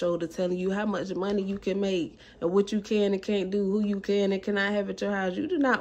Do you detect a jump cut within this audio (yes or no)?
no